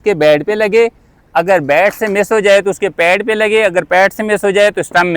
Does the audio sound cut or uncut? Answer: uncut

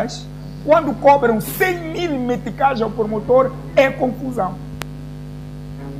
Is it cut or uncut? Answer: uncut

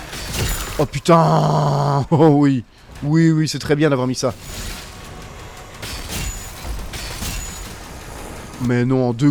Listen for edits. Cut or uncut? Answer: uncut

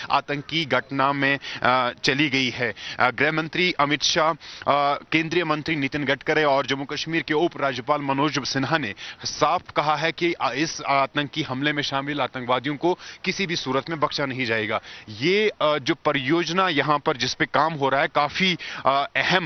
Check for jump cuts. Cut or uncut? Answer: uncut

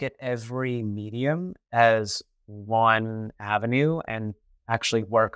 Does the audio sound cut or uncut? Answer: uncut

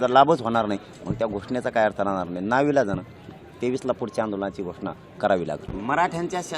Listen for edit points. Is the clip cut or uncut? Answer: cut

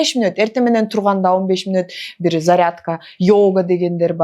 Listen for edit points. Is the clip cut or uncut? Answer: uncut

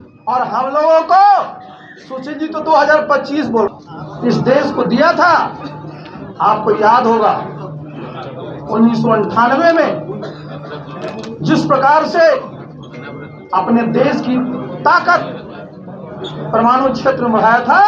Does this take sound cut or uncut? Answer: cut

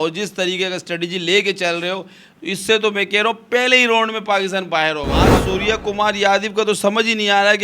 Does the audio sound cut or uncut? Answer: cut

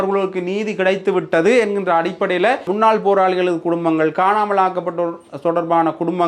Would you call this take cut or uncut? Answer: cut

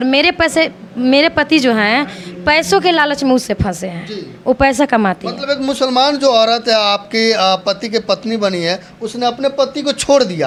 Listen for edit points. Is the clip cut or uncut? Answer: uncut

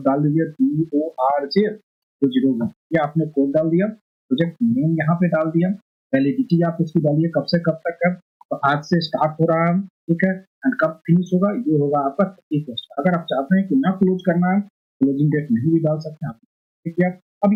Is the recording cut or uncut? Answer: uncut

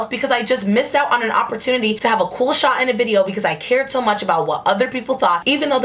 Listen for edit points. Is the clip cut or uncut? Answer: uncut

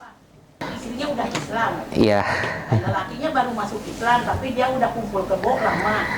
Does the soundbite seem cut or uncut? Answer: uncut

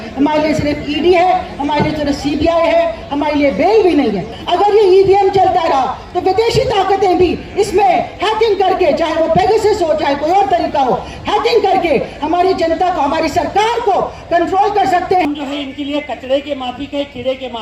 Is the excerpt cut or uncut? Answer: cut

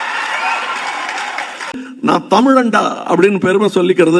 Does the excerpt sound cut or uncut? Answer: cut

